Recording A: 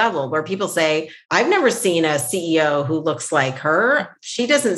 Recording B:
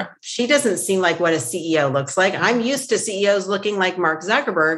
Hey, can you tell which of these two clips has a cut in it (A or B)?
A